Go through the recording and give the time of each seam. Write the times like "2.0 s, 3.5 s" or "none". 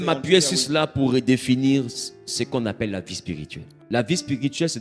3.7 s